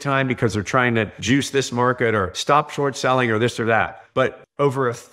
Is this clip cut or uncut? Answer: cut